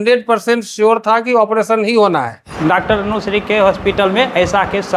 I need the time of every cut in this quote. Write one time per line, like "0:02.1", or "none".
0:02.4